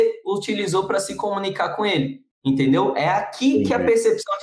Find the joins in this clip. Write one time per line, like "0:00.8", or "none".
0:02.2